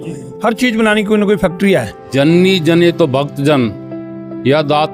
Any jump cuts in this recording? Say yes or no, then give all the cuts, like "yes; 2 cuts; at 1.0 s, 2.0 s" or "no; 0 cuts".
yes; 1 cut; at 2.0 s